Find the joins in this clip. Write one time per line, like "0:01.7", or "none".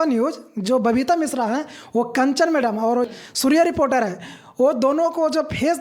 0:03.1